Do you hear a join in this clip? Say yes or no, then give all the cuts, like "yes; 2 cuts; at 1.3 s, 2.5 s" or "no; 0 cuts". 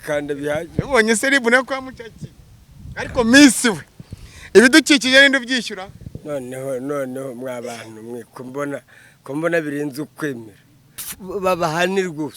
yes; 1 cut; at 11.1 s